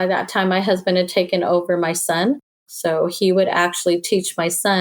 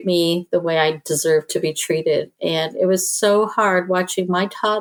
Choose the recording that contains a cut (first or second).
first